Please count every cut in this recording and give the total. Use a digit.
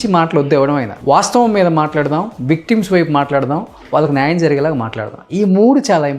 1